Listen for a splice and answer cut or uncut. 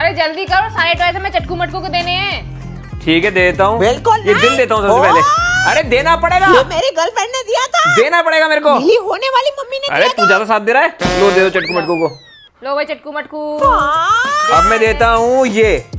uncut